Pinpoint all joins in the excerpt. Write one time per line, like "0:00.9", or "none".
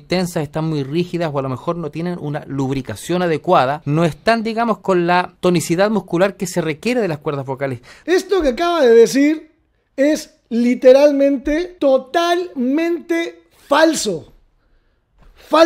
0:03.8
0:05.3
0:07.9
0:11.7